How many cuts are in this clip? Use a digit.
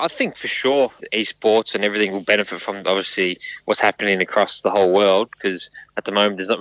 1